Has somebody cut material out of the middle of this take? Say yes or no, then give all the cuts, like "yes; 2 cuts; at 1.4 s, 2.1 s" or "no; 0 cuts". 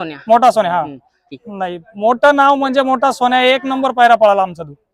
yes; 1 cut; at 1.3 s